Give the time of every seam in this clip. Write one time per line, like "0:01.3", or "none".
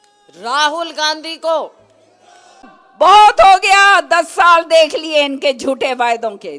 0:02.8